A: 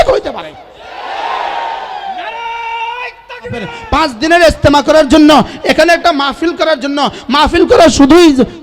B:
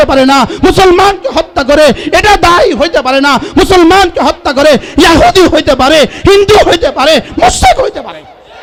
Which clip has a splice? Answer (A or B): A